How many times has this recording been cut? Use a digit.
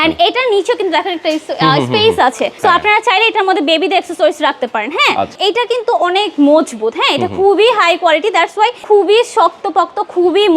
2